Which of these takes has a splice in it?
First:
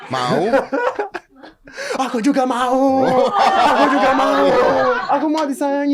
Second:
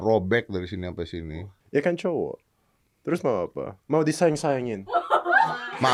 first; 1 cut; at 5.0 s

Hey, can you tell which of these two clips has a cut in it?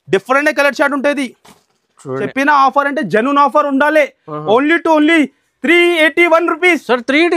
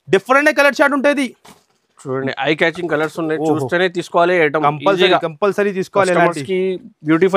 first; 1 cut; at 2.3 s

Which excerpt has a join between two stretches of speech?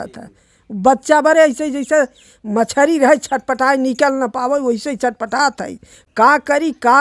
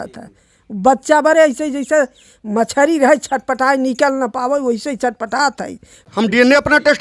second; 1 cut; at 6.0 s

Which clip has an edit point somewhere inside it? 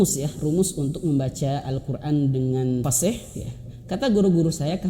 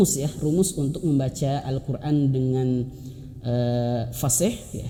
first; 1 cut; at 2.9 s

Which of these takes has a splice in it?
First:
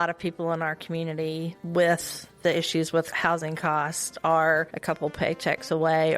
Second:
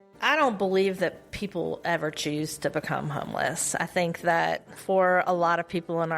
first; 3 cuts; at 1.6 s, 3.1 s, 4.7 s

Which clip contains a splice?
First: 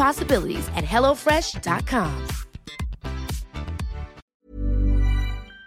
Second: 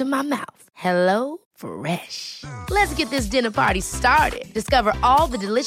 first; 1 cut; at 4.4 s

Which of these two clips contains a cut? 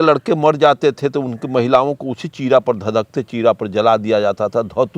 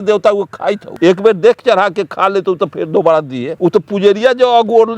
second; 2 cuts; at 0.9 s, 3.5 s

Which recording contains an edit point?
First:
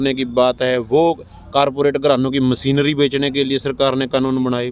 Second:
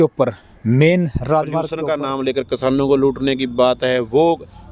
second; 1 cut; at 1.8 s

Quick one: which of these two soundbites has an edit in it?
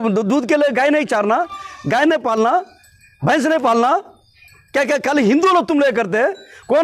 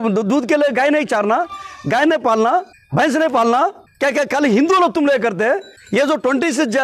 second; 3 cuts; at 2.8 s, 3.9 s, 5.7 s

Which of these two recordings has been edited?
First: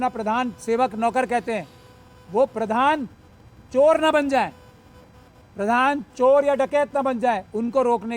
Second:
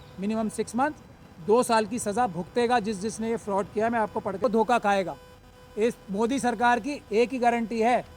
second; 1 cut; at 4.4 s

